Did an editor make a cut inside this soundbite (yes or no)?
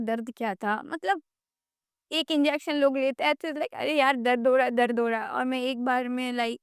no